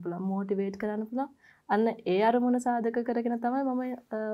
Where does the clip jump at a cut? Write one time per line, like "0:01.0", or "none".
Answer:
none